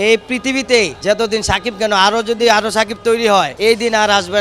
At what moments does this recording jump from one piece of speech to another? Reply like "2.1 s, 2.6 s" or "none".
1.0 s, 3.5 s